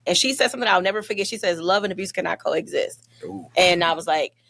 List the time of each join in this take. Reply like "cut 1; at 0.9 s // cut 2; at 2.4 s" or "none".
none